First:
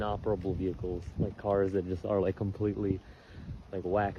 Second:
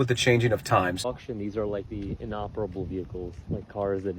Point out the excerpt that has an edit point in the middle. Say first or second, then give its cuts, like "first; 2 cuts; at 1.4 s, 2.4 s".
second; 1 cut; at 1.1 s